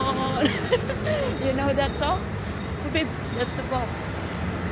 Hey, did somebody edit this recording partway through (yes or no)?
no